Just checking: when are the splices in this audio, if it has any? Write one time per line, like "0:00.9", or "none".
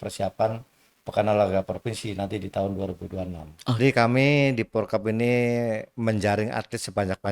0:03.8